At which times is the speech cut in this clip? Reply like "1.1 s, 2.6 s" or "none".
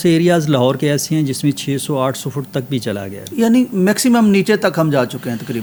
none